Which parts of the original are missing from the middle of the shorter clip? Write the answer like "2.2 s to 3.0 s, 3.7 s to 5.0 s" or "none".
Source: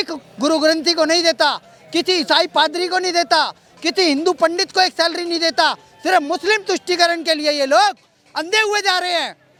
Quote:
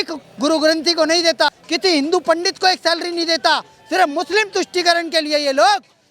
1.6 s to 3.7 s